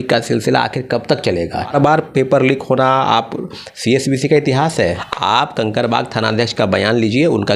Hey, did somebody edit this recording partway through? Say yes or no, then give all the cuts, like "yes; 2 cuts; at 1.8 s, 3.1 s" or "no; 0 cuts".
yes; 2 cuts; at 1.7 s, 4.9 s